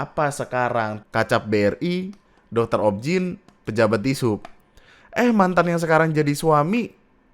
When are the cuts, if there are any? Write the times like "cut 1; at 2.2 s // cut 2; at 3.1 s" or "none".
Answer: cut 1; at 1.0 s